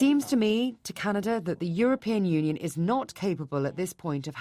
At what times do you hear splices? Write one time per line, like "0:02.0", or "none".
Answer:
none